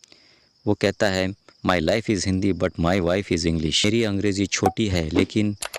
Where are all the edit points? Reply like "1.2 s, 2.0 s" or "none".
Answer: none